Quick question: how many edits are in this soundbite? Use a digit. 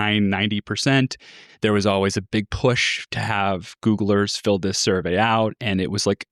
1